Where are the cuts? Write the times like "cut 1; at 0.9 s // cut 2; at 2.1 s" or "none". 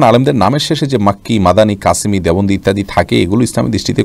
none